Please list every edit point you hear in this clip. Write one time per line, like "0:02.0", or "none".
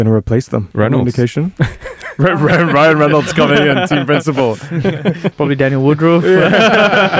none

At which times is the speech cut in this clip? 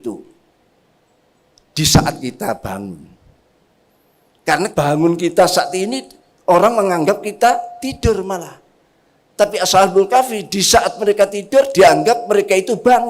0:04.7

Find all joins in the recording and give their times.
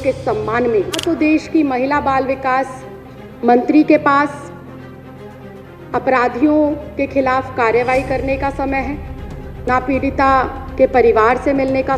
0:01.0

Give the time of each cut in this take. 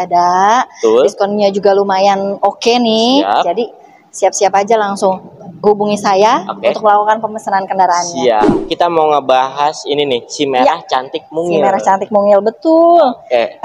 0:08.6

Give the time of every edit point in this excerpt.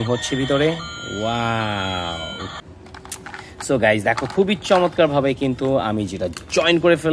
0:02.5

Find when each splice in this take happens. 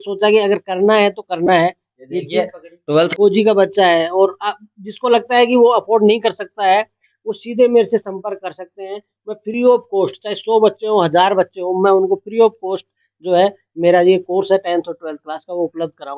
0:03.1

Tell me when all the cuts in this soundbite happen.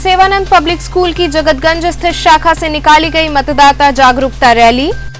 none

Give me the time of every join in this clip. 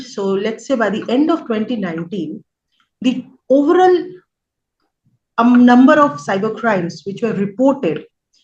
none

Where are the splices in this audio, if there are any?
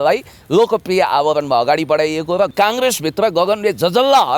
0:02.5

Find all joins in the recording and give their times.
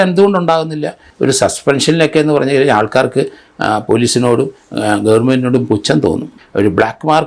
0:01.1
0:06.4

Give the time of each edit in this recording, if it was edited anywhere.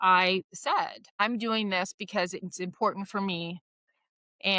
0:01.0

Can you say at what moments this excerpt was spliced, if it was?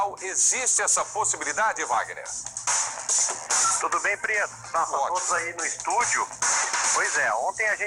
none

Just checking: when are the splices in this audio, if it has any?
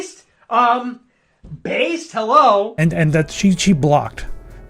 0:02.7

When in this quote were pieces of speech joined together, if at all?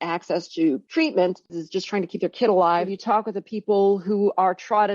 0:00.8
0:01.6
0:03.0

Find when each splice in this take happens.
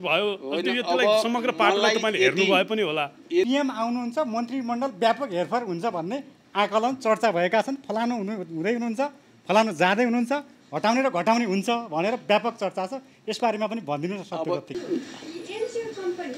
0:03.5
0:14.7

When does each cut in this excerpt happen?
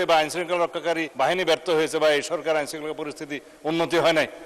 0:01.1

